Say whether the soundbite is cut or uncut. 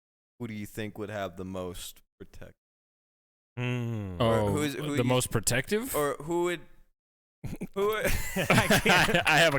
uncut